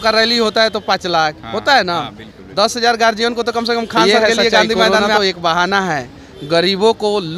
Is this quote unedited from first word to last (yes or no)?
no